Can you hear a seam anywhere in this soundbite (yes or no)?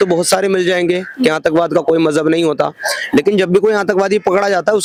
no